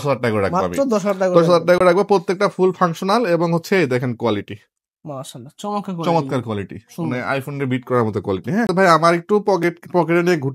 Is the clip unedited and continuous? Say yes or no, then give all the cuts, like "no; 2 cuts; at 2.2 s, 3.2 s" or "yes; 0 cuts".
yes; 0 cuts